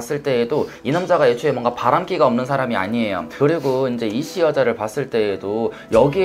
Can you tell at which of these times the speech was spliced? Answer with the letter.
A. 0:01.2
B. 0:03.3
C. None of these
B